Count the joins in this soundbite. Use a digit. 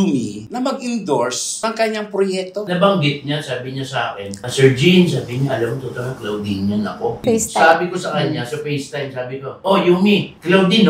2